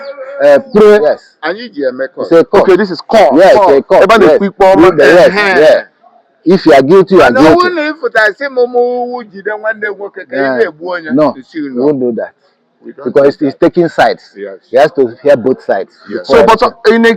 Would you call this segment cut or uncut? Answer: cut